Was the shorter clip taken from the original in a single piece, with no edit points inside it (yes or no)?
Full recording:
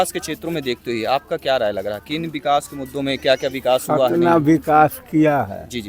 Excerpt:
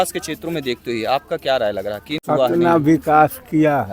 no